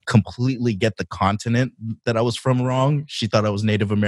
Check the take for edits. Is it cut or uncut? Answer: uncut